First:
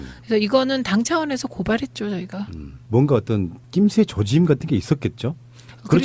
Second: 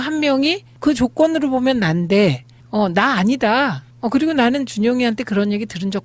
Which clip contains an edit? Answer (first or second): first